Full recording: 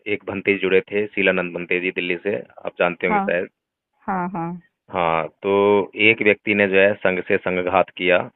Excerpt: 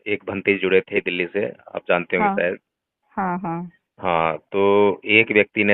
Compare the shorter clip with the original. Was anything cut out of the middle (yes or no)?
yes